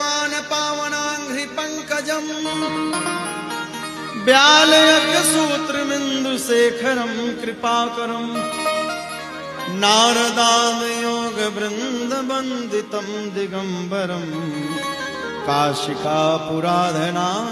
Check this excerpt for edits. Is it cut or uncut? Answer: cut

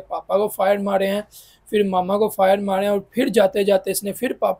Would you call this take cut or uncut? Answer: uncut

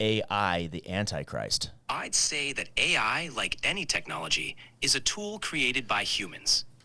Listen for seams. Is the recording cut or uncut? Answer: cut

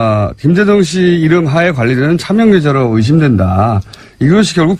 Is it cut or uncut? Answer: cut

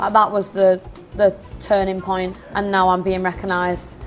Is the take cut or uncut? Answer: cut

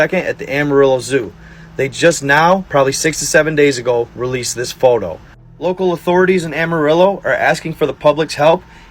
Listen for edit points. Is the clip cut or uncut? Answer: uncut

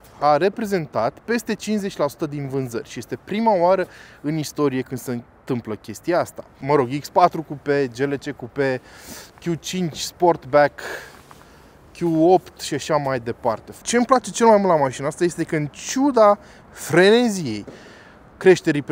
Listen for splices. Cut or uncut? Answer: cut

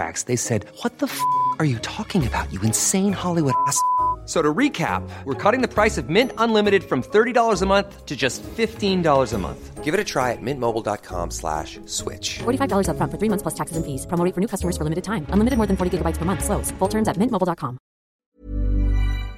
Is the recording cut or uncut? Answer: cut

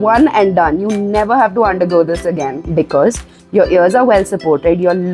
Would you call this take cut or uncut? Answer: cut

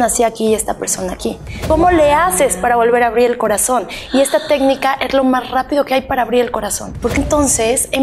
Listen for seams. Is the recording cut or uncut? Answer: cut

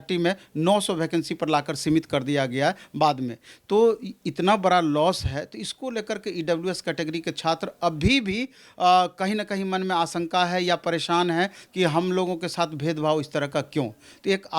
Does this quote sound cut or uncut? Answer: uncut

